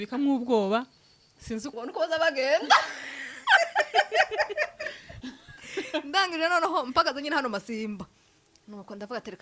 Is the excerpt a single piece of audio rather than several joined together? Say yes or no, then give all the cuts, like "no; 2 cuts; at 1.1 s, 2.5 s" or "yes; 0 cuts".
no; 1 cut; at 1.8 s